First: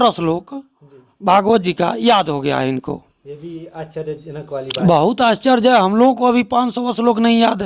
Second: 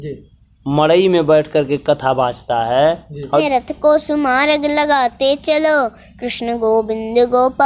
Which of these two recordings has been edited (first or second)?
second